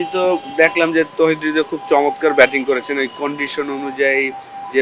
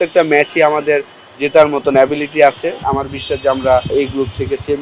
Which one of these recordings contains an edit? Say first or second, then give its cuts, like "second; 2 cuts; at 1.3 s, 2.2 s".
second; 2 cuts; at 2.8 s, 3.9 s